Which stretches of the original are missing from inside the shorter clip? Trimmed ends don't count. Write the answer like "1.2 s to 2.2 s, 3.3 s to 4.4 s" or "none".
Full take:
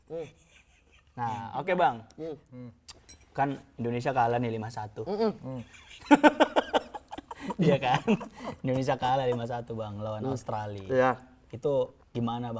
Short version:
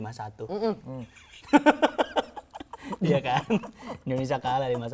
none